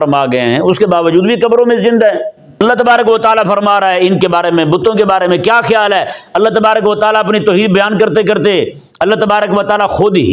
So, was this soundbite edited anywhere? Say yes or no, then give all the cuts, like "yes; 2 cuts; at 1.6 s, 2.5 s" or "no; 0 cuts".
yes; 1 cut; at 2.6 s